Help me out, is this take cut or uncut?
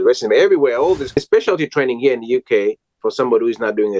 cut